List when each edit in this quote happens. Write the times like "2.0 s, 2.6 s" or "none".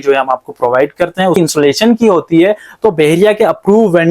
1.3 s